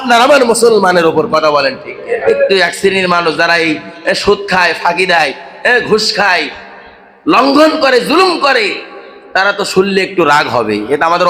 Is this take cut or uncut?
cut